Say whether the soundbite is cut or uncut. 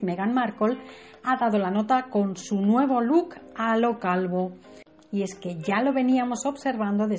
uncut